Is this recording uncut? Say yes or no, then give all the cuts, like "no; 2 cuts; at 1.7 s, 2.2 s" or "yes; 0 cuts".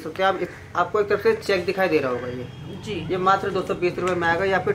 yes; 0 cuts